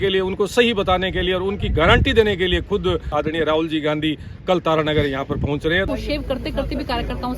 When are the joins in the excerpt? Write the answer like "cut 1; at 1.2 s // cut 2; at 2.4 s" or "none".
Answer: cut 1; at 3.1 s // cut 2; at 5.9 s